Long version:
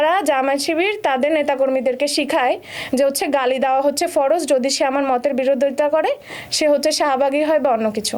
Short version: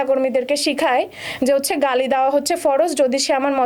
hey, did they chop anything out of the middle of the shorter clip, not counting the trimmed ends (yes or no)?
no